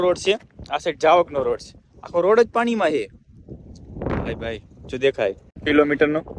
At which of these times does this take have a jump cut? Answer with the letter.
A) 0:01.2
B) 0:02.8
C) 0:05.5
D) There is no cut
C